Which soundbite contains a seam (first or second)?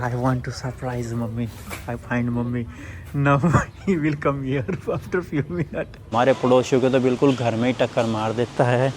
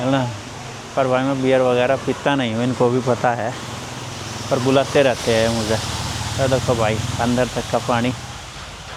first